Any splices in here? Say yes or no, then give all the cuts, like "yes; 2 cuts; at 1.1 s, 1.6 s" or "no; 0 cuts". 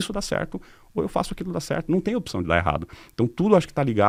no; 0 cuts